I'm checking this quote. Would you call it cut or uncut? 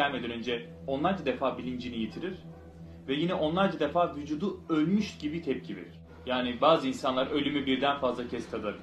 cut